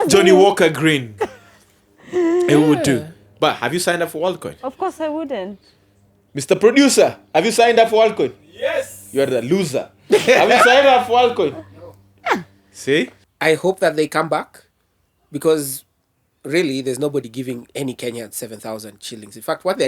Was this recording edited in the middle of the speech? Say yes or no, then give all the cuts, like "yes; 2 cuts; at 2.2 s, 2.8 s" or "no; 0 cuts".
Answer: yes; 1 cut; at 13.2 s